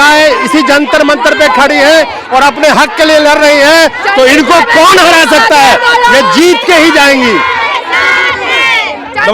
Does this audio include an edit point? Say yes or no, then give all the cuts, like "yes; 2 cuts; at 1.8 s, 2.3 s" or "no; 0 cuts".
no; 0 cuts